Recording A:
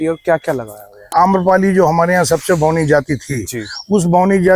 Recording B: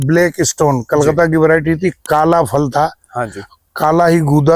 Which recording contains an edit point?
A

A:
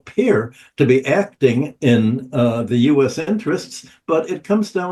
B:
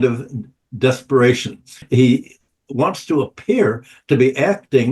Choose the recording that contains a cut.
B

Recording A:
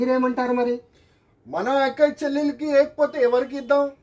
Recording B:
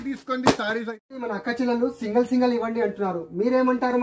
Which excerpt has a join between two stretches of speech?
B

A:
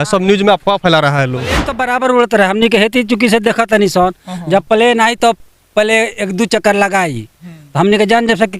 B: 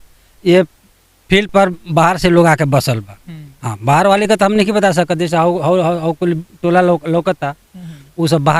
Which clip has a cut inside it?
A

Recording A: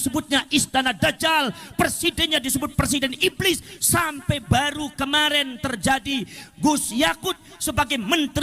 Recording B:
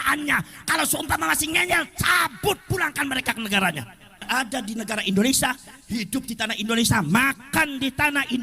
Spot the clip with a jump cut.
B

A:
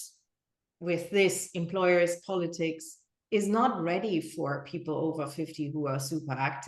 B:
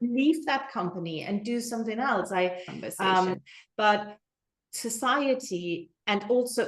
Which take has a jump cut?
B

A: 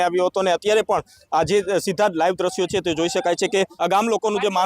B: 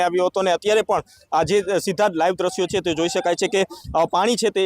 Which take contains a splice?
A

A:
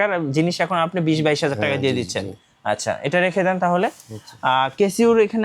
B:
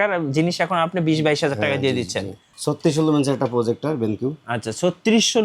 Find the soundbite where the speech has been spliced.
B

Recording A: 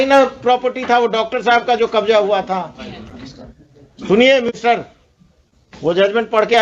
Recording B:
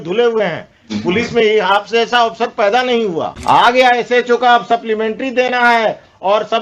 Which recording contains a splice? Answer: B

